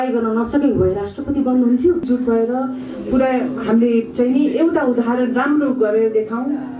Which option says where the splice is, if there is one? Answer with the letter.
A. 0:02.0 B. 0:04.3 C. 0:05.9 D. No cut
A